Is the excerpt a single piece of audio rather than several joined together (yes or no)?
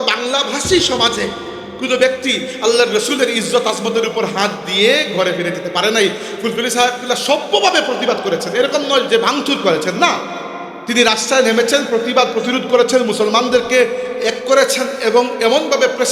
yes